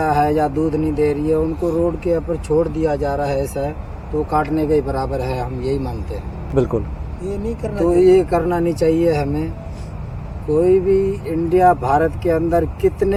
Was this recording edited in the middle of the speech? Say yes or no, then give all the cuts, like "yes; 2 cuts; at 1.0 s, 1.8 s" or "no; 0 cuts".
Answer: no; 0 cuts